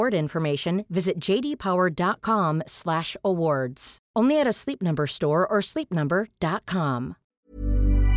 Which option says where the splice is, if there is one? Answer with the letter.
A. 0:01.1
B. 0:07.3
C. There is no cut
B